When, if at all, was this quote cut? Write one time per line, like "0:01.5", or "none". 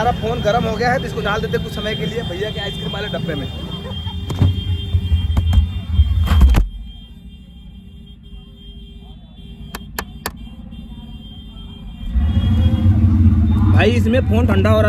none